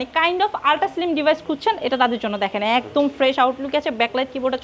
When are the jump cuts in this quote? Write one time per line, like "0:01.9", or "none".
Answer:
none